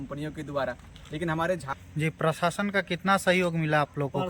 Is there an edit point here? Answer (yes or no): yes